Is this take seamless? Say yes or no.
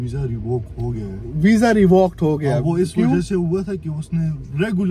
yes